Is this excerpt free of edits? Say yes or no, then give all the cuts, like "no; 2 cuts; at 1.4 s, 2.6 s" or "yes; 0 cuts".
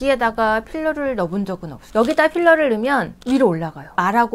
no; 1 cut; at 1.7 s